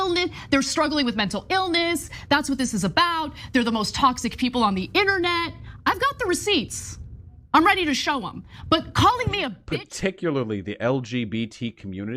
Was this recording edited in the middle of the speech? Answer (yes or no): yes